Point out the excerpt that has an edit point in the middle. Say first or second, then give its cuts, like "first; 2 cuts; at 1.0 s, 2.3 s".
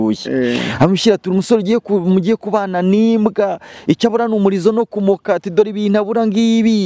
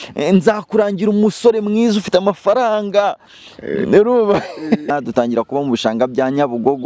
second; 1 cut; at 4.9 s